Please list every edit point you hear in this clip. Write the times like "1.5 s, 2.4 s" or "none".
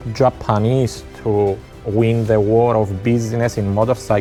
none